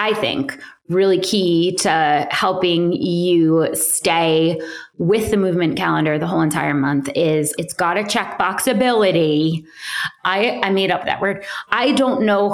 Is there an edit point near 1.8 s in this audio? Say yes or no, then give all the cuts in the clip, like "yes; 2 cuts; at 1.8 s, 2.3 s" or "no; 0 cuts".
no; 1 cut; at 7.6 s